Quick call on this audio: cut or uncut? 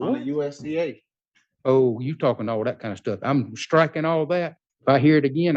cut